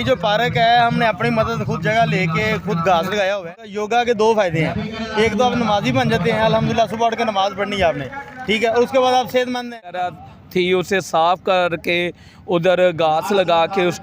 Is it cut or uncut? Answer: cut